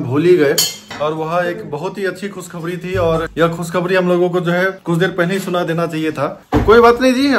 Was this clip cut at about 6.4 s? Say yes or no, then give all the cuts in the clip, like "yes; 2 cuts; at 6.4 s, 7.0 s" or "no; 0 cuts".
yes; 1 cut; at 6.4 s